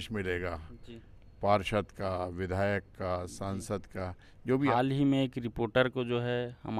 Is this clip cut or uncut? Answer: cut